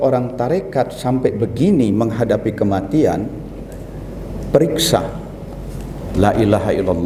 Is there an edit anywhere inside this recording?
no; 0 cuts

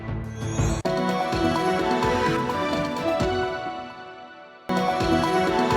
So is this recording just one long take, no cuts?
no; 1 cut; at 4.7 s

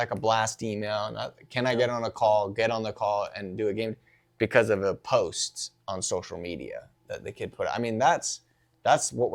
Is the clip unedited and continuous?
yes; 0 cuts

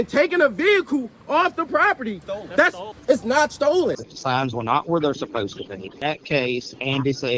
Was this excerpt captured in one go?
no; 3 cuts; at 2.6 s, 4.1 s, 5.9 s

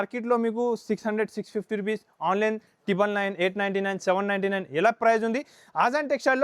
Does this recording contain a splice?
no; 0 cuts

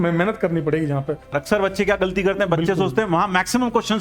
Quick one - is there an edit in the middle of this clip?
yes; 1 cut; at 1.4 s

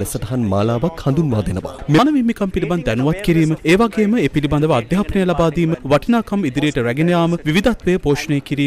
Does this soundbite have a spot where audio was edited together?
yes; 1 cut; at 2.0 s

